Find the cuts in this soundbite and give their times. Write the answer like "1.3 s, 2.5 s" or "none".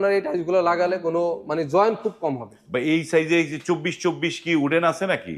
none